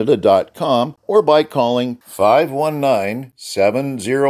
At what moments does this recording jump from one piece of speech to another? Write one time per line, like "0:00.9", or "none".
0:01.0